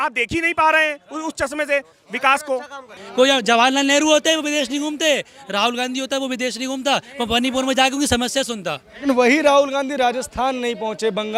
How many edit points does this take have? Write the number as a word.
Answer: zero